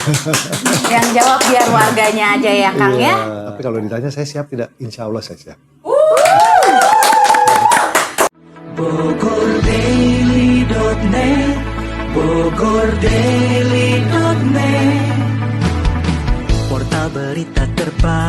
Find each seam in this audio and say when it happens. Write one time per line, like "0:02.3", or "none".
0:03.4
0:08.3

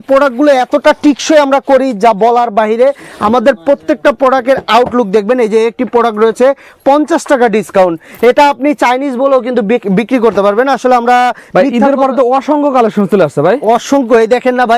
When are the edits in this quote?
none

